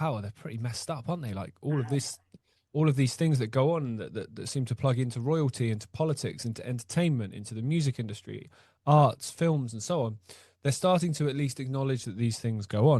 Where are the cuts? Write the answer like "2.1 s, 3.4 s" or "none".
none